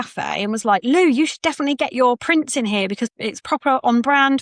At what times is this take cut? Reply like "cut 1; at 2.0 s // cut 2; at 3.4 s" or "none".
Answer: cut 1; at 3.0 s